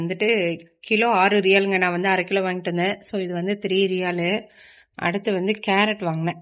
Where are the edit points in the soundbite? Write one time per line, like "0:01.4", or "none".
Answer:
none